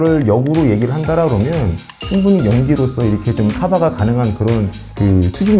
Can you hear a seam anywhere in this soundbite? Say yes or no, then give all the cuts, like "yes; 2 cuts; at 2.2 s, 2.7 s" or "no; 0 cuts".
no; 0 cuts